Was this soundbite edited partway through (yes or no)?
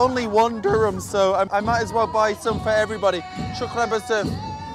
no